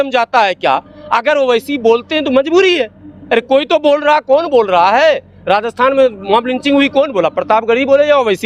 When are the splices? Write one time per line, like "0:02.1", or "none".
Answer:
none